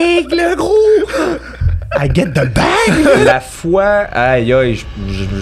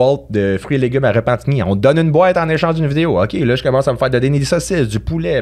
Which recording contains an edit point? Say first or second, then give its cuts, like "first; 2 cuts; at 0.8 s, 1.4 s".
first; 1 cut; at 3.3 s